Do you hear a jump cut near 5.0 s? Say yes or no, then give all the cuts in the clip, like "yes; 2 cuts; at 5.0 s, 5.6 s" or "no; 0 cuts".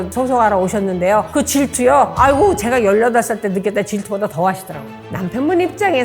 yes; 1 cut; at 5.0 s